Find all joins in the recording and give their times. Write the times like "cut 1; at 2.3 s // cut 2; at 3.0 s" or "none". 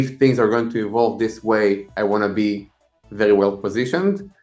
none